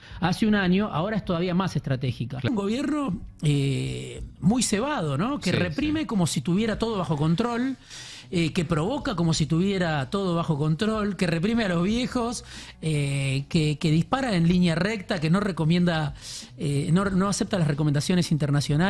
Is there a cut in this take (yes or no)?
yes